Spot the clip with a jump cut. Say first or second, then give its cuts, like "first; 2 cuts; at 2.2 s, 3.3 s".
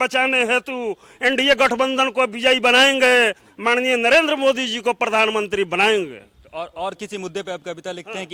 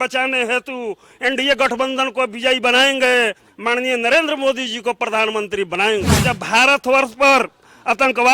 second; 1 cut; at 6.1 s